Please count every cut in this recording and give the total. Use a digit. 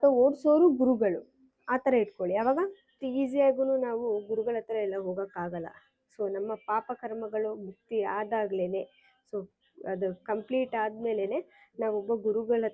1